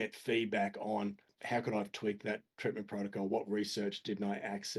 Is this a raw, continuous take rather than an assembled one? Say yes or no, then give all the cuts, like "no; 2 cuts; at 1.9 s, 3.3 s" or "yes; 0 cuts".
no; 1 cut; at 1.3 s